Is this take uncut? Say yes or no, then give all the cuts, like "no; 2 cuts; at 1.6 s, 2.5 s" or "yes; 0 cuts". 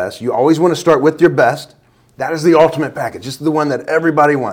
yes; 0 cuts